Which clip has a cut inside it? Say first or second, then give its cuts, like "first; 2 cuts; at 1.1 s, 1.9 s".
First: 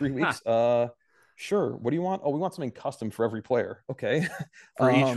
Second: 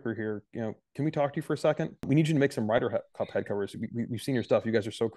second; 1 cut; at 2.1 s